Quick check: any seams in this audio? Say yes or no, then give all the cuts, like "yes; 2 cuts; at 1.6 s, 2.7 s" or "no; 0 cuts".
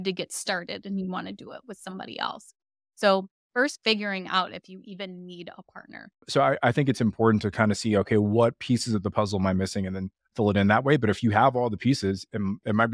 yes; 1 cut; at 6.2 s